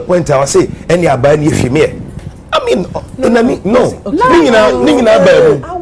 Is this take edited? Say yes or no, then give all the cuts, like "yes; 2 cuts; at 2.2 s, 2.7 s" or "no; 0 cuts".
no; 0 cuts